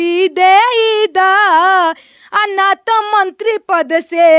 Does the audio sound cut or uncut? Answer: uncut